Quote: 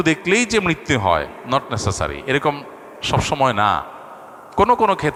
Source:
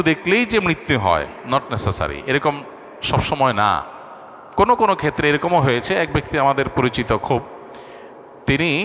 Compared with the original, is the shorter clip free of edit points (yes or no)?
yes